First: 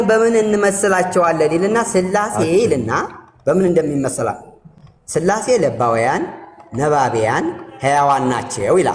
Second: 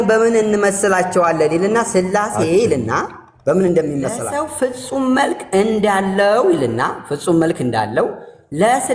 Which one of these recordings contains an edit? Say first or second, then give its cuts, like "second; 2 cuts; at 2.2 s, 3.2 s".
second; 1 cut; at 4.2 s